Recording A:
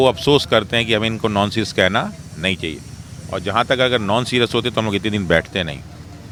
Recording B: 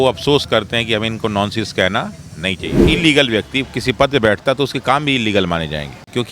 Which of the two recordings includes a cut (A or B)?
B